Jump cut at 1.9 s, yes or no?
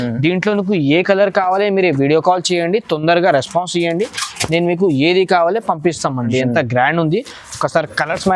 no